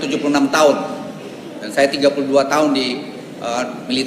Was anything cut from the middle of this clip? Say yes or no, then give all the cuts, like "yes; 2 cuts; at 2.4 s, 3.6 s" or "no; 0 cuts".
no; 0 cuts